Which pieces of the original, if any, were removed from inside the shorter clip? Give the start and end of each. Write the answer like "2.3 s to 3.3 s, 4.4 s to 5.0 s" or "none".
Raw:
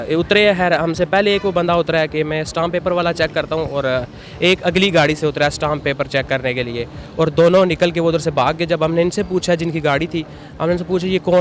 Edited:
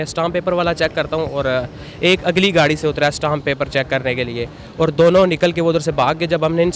none